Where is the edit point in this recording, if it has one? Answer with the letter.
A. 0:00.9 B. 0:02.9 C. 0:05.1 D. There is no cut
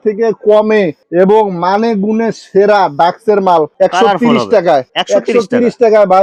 D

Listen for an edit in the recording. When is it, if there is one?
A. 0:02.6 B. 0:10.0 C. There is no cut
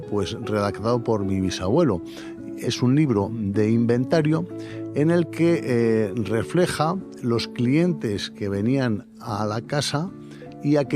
A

